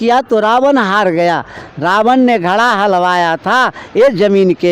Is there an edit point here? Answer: yes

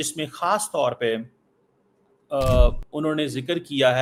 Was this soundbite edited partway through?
no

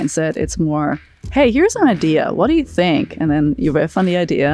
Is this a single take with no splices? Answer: yes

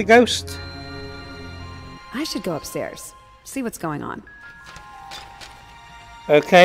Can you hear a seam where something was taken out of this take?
yes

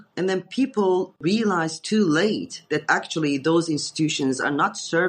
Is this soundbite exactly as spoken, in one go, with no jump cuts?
yes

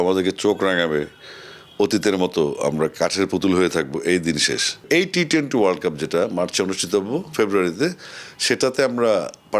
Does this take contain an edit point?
yes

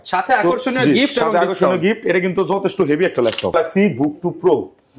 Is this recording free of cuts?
no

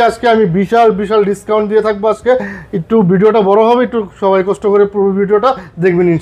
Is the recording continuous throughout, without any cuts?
yes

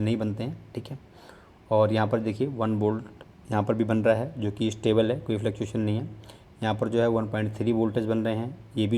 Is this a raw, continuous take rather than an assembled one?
yes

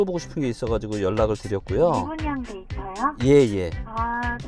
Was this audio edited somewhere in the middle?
no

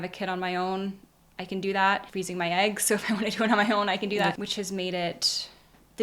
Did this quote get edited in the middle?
yes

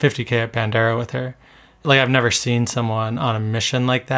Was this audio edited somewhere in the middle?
yes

